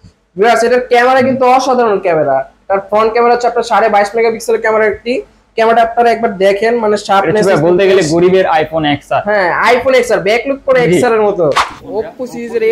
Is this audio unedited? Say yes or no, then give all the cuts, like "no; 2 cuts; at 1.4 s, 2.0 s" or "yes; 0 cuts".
no; 1 cut; at 11.7 s